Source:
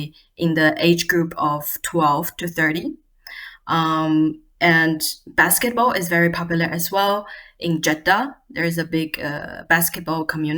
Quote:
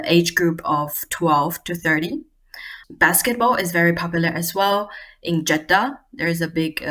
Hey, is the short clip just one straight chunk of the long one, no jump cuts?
no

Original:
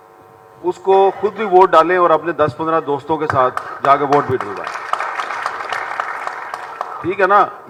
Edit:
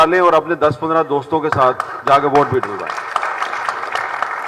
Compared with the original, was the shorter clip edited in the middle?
no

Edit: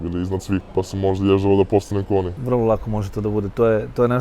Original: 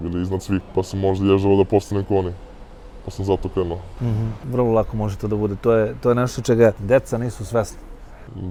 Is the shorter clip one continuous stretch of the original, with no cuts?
no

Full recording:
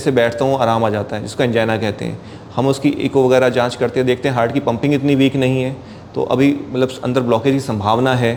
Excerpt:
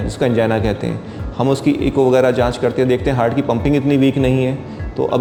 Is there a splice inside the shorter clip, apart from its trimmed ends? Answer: no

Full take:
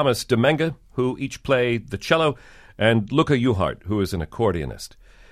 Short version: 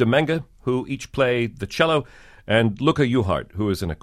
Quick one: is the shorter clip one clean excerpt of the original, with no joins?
yes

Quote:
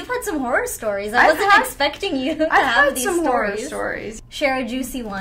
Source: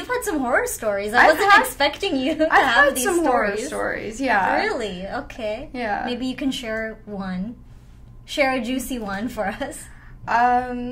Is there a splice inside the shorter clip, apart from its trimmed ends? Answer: yes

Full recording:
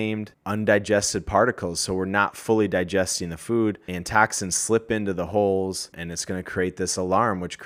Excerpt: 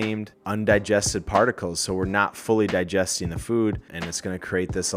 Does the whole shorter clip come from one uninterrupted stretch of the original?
no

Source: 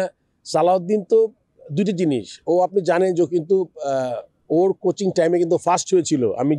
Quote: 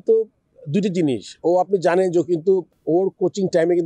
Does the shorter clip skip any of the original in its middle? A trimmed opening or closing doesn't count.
yes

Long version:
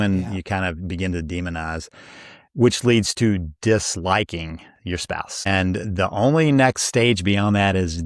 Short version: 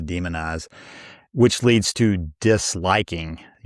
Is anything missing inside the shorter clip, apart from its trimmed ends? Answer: no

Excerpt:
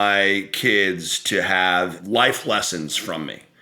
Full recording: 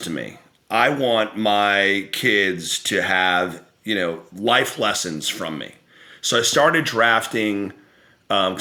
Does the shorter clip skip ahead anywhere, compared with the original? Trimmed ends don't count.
yes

